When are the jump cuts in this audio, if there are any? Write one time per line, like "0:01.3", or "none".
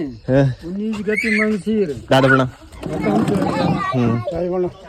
none